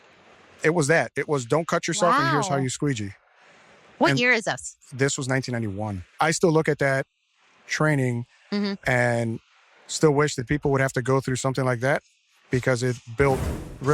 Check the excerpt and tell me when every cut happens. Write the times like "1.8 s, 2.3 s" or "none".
6.1 s